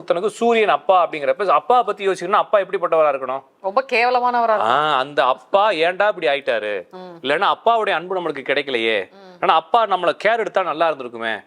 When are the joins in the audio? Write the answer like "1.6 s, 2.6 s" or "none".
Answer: none